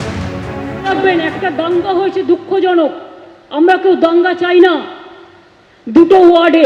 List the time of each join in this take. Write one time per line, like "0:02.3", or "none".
0:00.9